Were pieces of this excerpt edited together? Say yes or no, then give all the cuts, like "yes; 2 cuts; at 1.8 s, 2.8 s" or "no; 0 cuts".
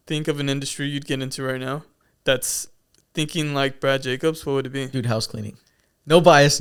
no; 0 cuts